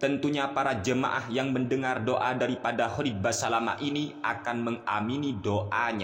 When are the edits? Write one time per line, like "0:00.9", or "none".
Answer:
none